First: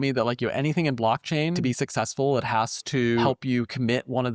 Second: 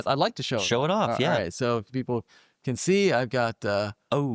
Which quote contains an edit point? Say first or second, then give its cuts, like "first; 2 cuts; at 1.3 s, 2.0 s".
first; 2 cuts; at 1.6 s, 3.2 s